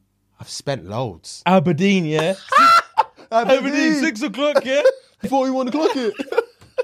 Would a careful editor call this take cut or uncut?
cut